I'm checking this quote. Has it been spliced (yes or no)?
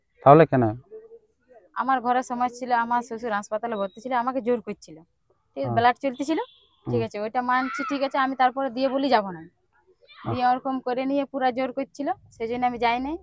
no